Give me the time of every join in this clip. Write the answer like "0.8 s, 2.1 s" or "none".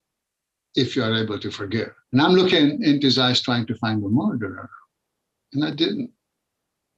2.0 s